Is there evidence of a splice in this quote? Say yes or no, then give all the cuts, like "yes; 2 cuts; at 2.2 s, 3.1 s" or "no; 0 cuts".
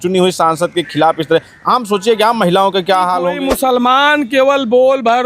yes; 1 cut; at 3.4 s